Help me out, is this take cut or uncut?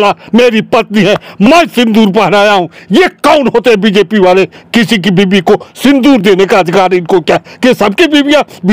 uncut